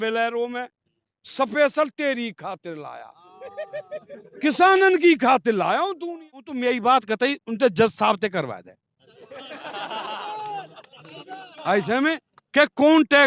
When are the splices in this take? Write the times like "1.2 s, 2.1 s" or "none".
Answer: 6.5 s